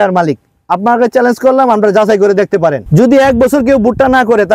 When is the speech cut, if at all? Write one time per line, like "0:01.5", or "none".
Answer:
0:02.8